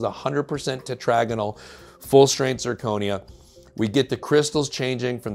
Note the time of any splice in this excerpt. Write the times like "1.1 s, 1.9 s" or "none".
none